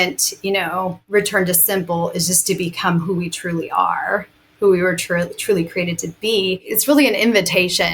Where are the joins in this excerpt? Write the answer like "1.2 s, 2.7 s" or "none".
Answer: 1.0 s, 6.7 s